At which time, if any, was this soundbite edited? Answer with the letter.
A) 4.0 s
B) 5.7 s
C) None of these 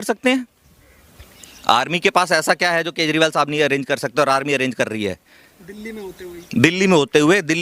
C